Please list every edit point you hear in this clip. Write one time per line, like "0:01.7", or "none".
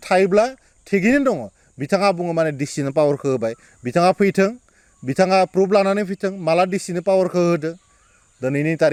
none